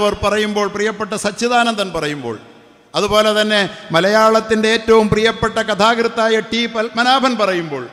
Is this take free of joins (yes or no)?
yes